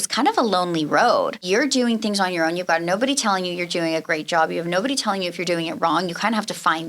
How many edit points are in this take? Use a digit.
1